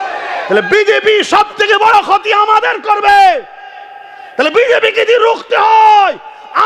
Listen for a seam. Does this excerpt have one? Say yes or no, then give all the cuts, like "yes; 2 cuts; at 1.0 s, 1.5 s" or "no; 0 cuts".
no; 0 cuts